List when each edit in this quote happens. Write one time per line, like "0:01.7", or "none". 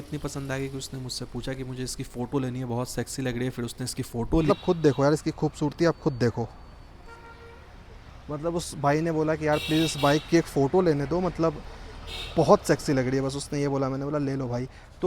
none